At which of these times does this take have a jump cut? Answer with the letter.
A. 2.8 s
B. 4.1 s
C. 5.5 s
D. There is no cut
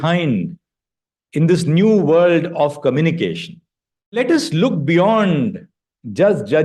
B